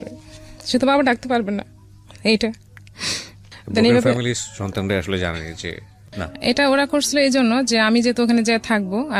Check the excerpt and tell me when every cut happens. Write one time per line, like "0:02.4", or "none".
0:06.3

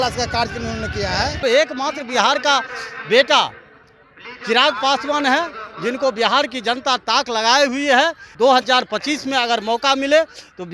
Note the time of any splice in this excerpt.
0:01.4
0:08.3

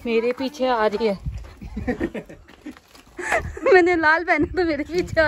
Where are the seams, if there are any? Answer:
none

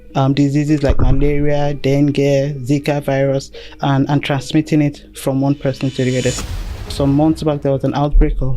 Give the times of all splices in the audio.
0:06.4

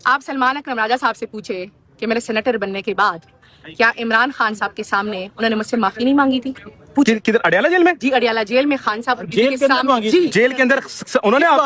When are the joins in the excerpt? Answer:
none

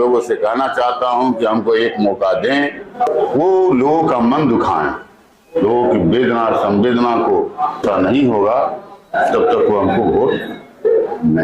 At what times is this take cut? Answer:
0:03.1
0:07.8

